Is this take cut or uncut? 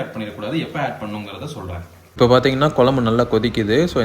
cut